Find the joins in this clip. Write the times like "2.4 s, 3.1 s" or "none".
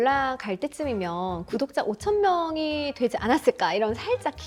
none